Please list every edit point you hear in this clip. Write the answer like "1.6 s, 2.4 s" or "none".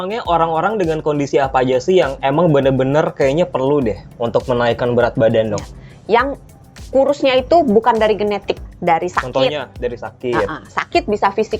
8.7 s